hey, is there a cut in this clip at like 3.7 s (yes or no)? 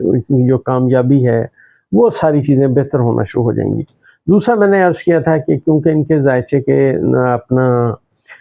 no